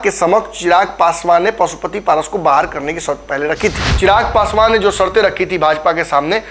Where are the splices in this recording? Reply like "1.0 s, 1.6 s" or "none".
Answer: 3.9 s